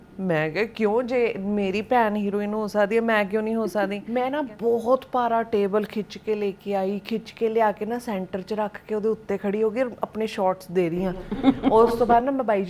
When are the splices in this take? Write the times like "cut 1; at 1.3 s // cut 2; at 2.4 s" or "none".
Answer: cut 1; at 4.0 s